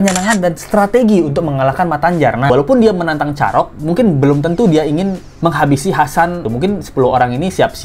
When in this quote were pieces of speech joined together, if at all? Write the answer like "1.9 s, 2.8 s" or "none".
2.5 s, 5.3 s, 6.4 s